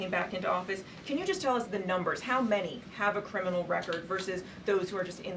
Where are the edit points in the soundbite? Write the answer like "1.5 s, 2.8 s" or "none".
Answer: none